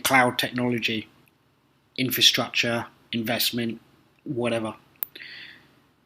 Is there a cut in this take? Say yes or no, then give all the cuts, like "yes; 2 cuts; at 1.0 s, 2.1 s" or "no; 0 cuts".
yes; 1 cut; at 3.9 s